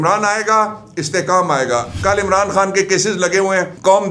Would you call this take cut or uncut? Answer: cut